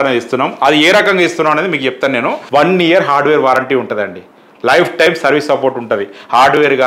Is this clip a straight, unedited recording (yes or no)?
no